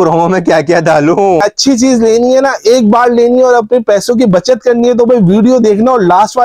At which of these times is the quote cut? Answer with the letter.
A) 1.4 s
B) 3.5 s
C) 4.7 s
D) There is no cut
A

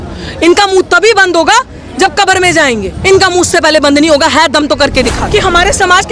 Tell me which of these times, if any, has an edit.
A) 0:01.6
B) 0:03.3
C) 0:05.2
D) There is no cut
C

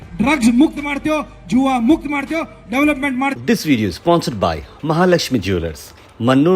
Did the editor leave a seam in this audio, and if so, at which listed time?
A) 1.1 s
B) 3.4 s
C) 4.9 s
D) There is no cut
B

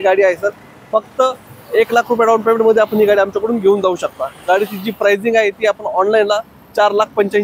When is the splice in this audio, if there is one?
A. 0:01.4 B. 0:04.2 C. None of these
C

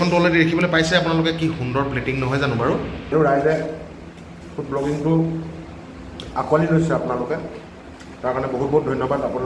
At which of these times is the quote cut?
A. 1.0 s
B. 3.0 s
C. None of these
B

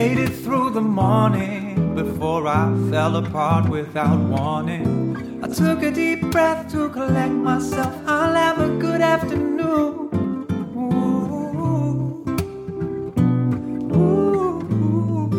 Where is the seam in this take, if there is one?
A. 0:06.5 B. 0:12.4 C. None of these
C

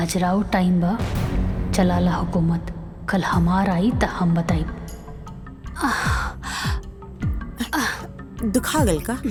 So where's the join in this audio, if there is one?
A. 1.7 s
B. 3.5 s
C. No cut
C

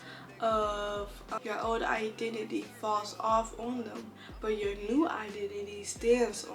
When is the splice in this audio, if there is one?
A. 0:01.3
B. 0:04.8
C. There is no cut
A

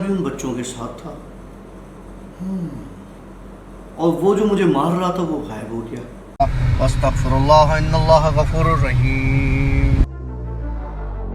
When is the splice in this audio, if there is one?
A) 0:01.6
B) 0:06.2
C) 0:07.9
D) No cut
B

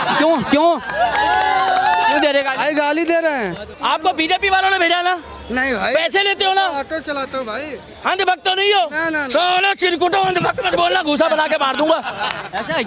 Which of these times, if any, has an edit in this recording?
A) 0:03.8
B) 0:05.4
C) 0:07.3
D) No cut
A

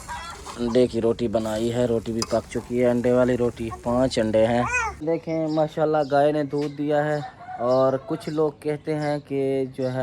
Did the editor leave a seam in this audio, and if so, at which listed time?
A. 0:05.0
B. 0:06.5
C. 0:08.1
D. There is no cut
A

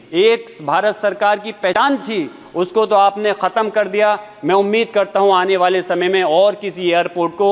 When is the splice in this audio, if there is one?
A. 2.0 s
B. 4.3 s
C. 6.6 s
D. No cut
D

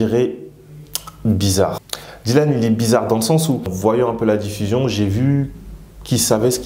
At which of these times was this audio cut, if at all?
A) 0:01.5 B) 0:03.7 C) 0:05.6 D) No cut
B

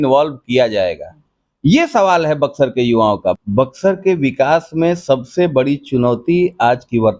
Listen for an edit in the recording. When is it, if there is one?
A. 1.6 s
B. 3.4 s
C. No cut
B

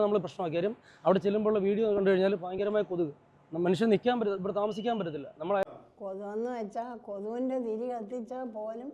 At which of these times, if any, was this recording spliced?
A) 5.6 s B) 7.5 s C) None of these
A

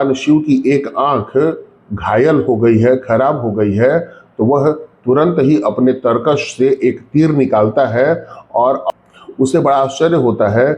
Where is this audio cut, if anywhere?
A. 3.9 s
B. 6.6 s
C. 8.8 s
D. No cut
C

